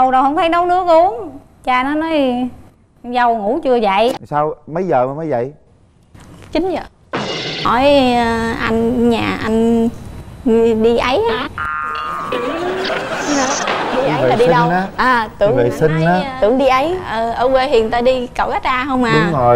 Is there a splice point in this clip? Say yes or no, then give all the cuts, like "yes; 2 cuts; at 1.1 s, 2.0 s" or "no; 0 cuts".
yes; 2 cuts; at 4.2 s, 7.6 s